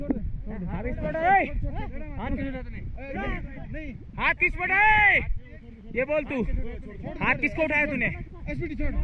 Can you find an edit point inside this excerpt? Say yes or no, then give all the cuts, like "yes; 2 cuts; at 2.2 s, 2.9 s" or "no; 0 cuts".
no; 0 cuts